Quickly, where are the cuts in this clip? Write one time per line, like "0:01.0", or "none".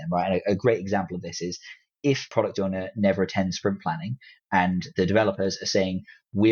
0:02.3